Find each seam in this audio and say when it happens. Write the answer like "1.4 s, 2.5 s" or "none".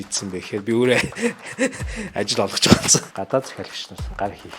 3.1 s